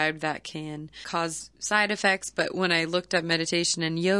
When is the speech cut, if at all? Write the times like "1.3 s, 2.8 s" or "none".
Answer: 1.0 s